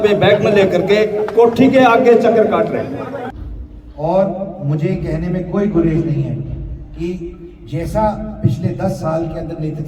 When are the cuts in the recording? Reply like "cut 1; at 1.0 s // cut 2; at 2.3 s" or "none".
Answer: cut 1; at 3.4 s